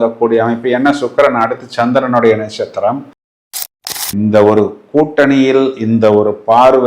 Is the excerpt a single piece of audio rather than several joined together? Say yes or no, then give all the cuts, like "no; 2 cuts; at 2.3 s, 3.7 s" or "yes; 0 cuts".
no; 1 cut; at 3.4 s